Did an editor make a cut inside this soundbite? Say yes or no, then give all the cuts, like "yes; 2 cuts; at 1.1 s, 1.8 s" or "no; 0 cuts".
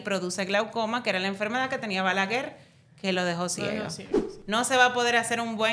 yes; 1 cut; at 4.3 s